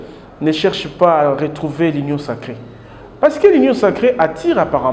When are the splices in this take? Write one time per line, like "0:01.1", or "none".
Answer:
none